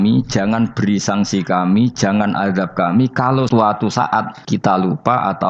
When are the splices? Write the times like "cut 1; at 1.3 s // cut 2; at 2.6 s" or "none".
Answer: cut 1; at 3.5 s // cut 2; at 4.4 s